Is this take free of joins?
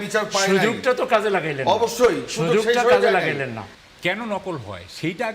no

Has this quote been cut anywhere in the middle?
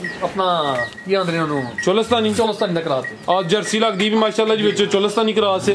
no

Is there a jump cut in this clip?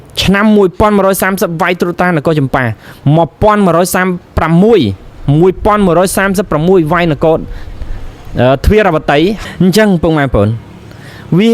yes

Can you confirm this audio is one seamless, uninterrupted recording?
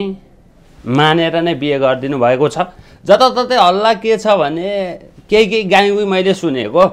yes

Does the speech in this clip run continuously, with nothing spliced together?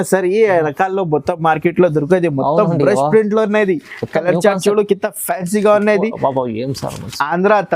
yes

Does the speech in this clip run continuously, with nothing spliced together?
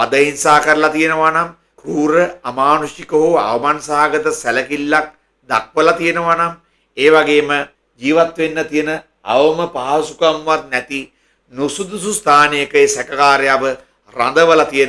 yes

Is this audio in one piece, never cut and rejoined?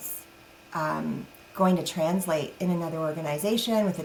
yes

